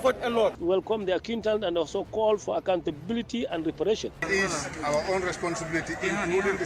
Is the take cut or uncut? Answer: cut